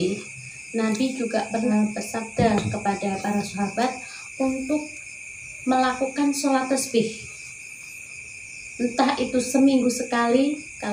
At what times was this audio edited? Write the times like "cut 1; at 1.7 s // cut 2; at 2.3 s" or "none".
cut 1; at 1.7 s